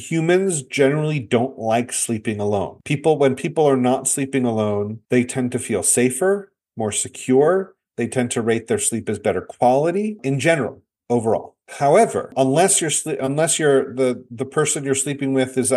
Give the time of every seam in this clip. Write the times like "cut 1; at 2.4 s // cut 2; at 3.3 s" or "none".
none